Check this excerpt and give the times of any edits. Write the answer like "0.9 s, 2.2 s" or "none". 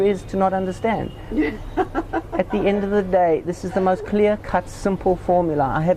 none